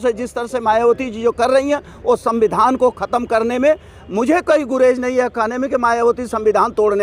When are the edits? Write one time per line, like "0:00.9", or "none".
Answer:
none